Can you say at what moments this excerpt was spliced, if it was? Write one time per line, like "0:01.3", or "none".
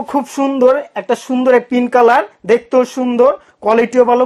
none